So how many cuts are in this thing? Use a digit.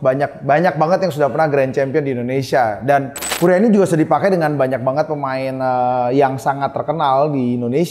1